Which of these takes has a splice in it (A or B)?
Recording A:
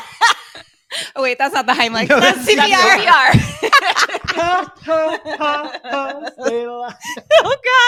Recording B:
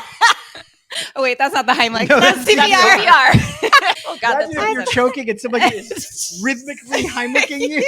B